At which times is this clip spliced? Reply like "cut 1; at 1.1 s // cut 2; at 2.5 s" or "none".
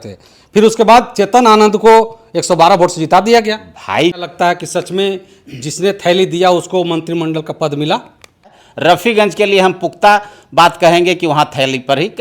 cut 1; at 4.2 s // cut 2; at 8.6 s